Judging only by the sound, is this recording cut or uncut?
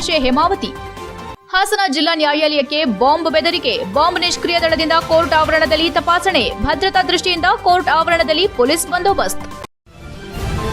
cut